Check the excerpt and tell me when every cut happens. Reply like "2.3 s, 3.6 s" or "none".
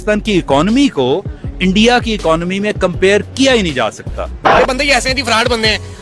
4.4 s